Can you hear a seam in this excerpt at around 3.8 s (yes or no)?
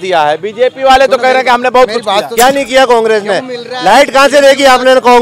no